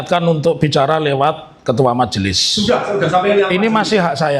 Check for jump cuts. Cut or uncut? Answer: uncut